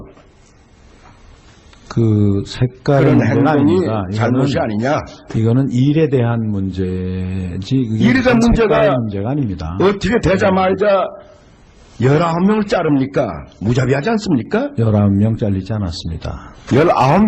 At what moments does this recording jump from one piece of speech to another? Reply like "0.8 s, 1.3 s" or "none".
4.3 s